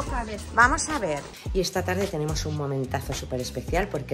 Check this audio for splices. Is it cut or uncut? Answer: cut